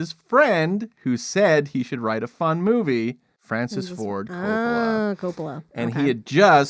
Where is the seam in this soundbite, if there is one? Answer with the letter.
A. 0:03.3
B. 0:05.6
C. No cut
A